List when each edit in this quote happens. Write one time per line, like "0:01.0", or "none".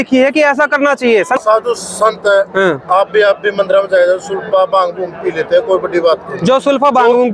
0:01.4